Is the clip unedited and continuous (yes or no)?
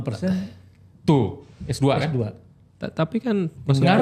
yes